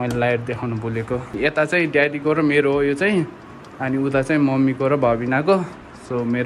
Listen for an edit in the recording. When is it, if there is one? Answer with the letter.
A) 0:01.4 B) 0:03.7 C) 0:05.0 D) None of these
A